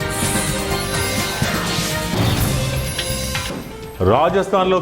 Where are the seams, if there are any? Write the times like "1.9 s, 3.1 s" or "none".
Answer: 3.4 s

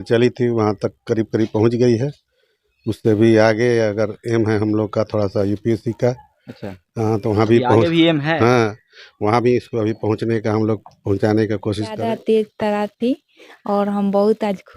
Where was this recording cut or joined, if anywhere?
12.0 s

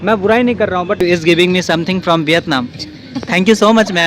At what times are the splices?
1.0 s

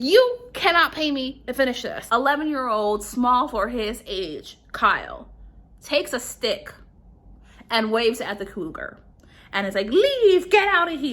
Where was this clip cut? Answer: 2.0 s

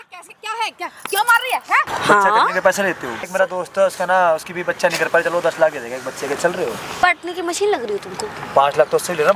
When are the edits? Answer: 1.9 s, 3.2 s, 7.0 s

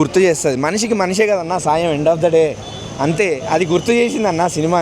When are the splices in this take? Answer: none

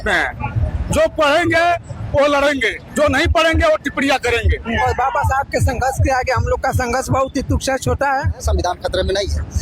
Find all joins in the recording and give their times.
4.6 s, 8.4 s

